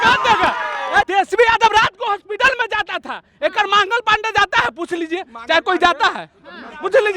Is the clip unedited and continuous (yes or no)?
no